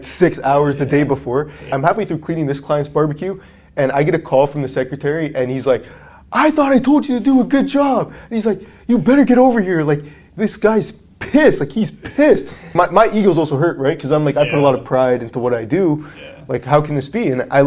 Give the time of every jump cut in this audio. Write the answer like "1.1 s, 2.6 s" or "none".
1.7 s, 12.7 s